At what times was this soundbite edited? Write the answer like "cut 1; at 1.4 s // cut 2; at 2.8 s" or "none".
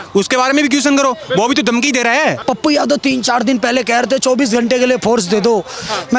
cut 1; at 2.4 s